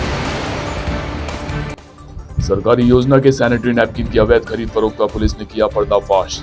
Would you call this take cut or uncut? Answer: cut